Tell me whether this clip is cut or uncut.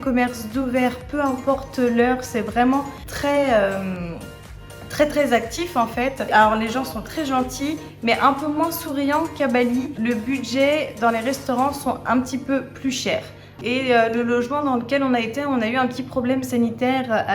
cut